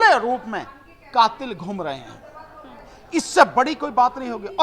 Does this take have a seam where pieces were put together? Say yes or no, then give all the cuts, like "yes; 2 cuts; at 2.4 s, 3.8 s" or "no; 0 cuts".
no; 0 cuts